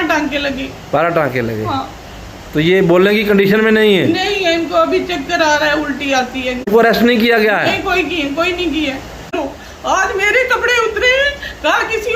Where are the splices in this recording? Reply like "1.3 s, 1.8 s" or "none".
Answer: 6.7 s, 9.4 s

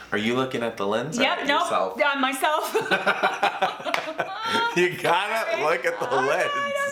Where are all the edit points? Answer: none

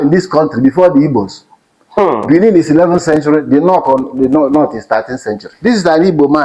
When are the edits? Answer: 5.5 s

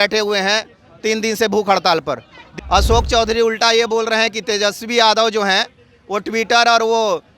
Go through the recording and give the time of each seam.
2.4 s

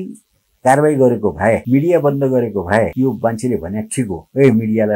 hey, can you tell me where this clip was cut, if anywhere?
1.6 s, 2.9 s

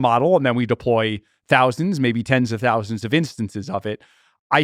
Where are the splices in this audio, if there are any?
none

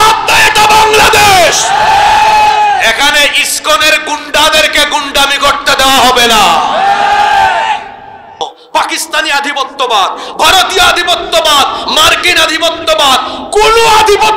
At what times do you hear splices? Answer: 8.4 s

